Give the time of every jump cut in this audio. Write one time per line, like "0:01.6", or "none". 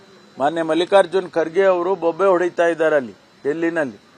none

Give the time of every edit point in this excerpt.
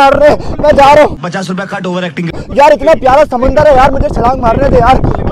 none

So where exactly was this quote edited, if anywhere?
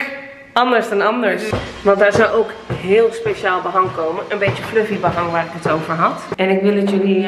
0:01.4
0:06.2

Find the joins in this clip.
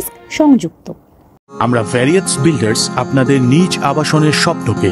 0:01.5

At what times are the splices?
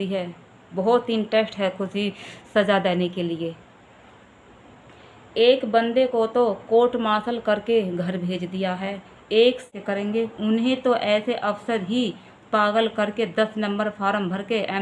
0:09.7

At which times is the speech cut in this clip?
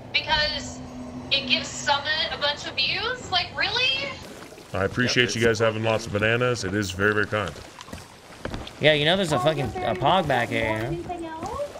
0:04.3

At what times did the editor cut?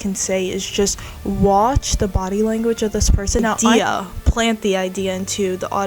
0:03.6

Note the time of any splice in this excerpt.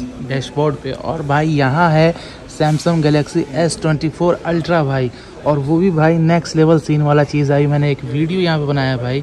none

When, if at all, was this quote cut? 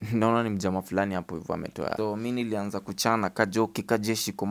0:01.9

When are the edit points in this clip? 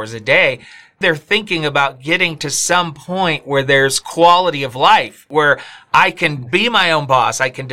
0:01.0
0:05.2

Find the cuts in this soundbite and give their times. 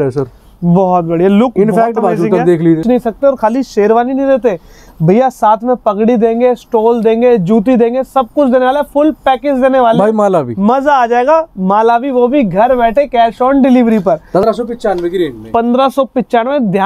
0:02.8
0:14.4

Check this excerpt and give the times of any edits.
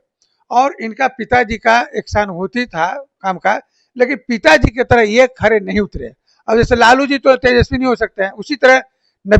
none

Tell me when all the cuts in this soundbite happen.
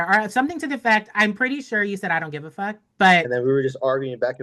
0:03.3

